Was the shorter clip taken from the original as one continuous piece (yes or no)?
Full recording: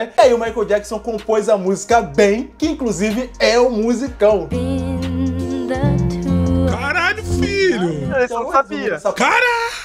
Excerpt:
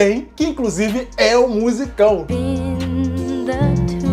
yes